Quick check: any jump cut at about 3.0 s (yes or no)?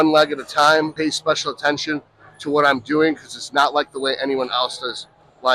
no